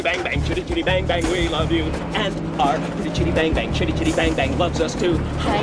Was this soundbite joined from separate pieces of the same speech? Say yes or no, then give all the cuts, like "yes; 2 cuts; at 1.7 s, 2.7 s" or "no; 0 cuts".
no; 0 cuts